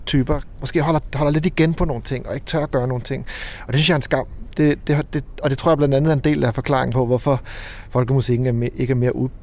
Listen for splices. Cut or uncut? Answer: uncut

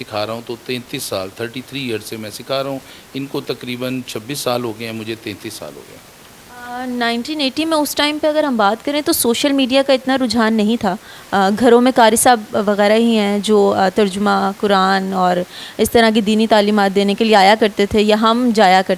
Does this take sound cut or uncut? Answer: uncut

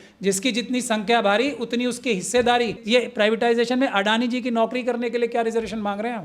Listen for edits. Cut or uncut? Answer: cut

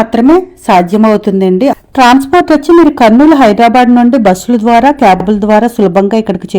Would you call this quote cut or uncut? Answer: cut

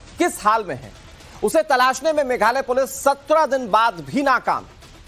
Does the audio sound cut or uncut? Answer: uncut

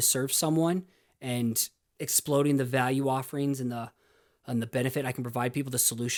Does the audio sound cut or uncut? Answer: uncut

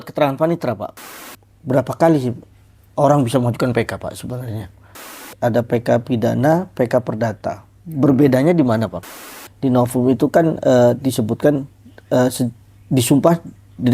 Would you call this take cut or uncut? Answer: cut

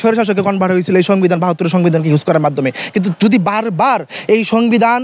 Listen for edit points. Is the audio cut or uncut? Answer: uncut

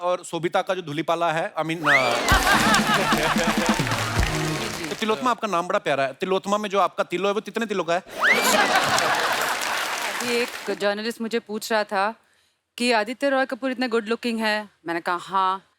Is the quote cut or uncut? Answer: cut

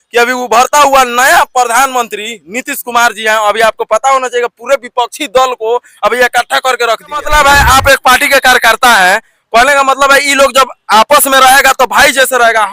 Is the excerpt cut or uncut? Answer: cut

